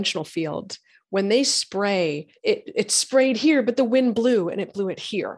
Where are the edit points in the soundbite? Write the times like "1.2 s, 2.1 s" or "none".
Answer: 2.3 s